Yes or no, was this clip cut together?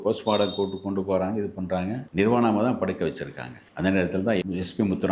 yes